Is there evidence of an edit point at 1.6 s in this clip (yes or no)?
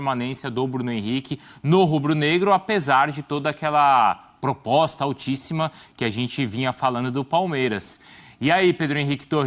no